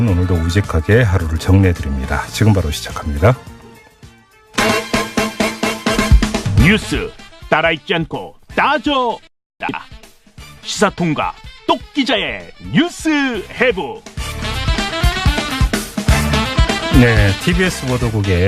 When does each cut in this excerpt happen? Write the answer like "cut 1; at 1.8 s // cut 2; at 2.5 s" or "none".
none

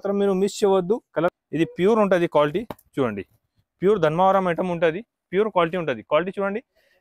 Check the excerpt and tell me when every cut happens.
cut 1; at 1.3 s

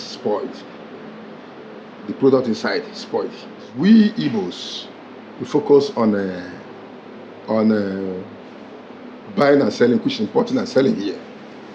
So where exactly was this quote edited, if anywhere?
cut 1; at 3.7 s

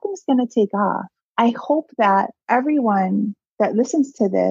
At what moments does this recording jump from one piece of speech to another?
cut 1; at 1.2 s // cut 2; at 2.4 s

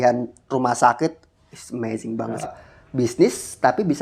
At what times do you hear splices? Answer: cut 1; at 2.5 s

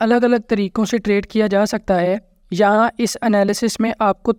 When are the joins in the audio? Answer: none

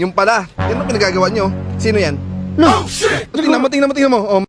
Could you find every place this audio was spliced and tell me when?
cut 1; at 3.4 s

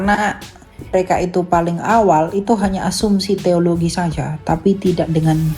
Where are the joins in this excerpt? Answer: cut 1; at 0.9 s

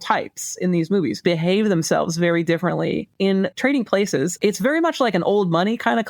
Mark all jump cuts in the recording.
cut 1; at 1.2 s // cut 2; at 3.3 s // cut 3; at 4.3 s

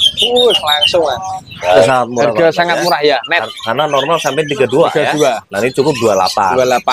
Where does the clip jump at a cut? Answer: cut 1; at 1.9 s

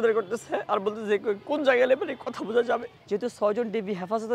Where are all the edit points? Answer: cut 1; at 2.9 s

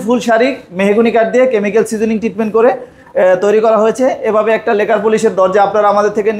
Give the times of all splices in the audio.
none

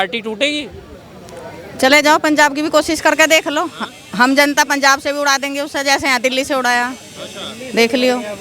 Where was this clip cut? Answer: none

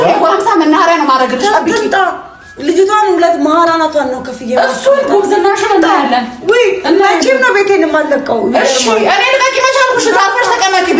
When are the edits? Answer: none

